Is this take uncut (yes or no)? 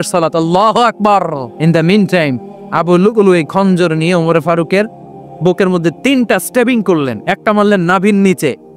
no